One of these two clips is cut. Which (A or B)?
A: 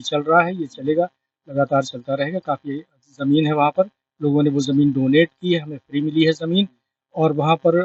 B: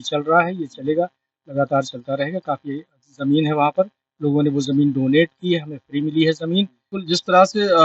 B